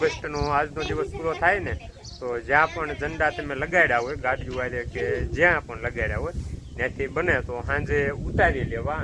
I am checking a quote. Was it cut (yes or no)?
no